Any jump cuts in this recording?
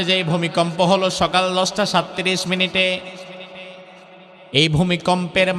no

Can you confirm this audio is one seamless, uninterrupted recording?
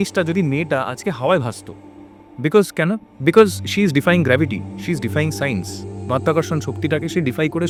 yes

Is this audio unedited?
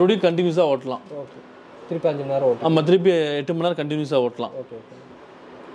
yes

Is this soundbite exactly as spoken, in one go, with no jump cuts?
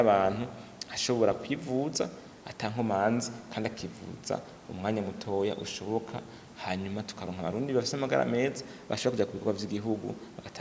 yes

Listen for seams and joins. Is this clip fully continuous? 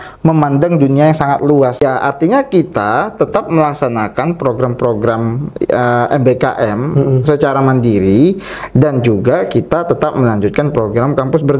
no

